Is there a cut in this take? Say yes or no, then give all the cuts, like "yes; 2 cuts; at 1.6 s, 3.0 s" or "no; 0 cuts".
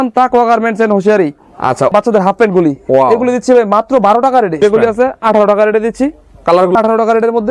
yes; 3 cuts; at 1.9 s, 4.6 s, 6.8 s